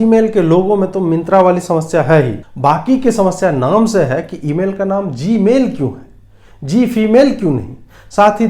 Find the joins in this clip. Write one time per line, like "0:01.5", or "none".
0:02.4